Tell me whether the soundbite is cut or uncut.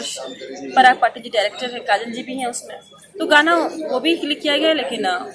uncut